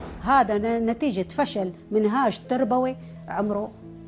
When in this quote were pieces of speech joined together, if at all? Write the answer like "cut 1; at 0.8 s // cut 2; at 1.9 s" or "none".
none